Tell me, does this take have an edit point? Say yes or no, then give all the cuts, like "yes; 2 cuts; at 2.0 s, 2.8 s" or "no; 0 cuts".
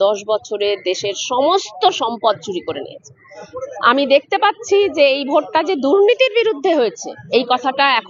yes; 1 cut; at 3.5 s